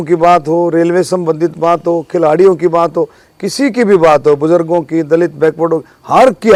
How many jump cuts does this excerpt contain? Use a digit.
0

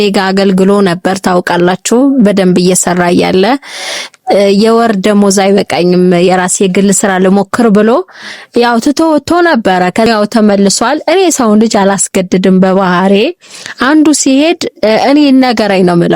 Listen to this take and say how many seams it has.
1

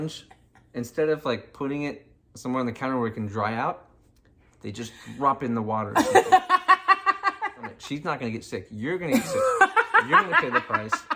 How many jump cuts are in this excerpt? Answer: 1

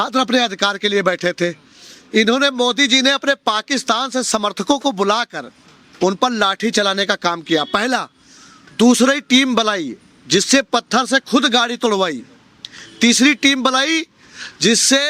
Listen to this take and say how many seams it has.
0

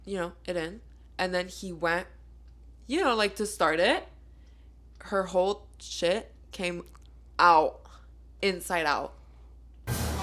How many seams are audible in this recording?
0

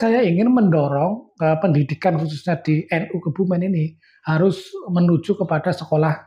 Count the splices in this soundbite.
0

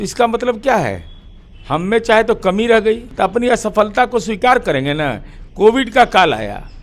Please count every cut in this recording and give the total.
1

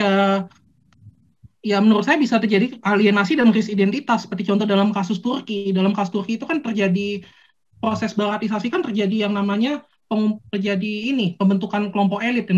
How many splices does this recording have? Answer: 0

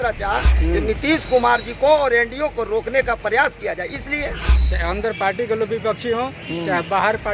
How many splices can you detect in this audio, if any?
1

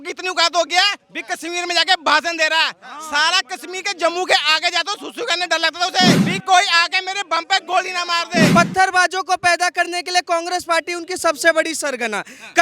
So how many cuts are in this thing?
2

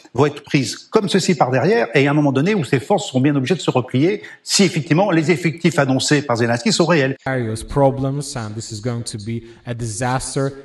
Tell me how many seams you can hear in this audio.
1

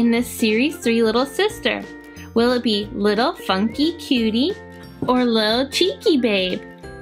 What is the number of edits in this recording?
0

